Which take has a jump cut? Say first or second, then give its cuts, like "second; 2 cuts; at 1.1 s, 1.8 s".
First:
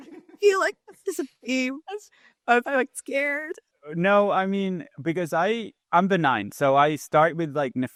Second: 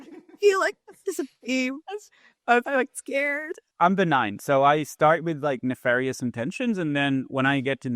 second; 1 cut; at 3.6 s